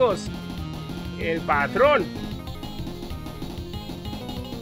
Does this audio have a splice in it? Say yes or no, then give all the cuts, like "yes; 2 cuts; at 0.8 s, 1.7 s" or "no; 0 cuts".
no; 0 cuts